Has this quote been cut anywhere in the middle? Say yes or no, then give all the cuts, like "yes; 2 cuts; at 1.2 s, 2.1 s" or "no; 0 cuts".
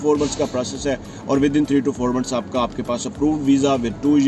no; 0 cuts